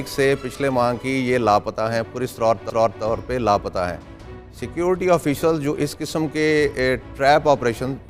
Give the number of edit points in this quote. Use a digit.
1